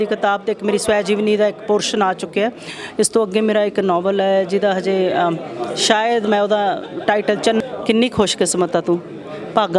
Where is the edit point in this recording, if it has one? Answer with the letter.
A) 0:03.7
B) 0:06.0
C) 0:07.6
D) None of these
C